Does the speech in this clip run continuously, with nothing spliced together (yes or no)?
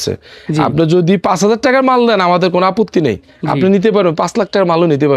yes